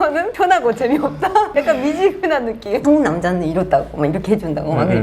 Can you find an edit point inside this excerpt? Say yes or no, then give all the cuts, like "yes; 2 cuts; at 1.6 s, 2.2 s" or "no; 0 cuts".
yes; 1 cut; at 2.8 s